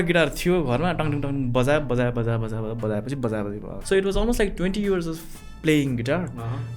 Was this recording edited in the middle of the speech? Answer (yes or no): yes